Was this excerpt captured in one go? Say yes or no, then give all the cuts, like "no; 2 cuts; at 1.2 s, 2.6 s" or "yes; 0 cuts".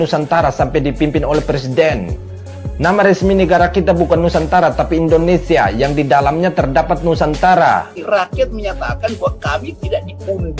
no; 1 cut; at 7.9 s